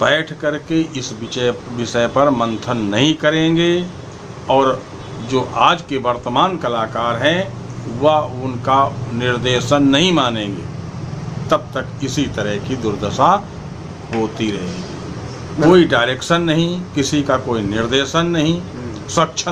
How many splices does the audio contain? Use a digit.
1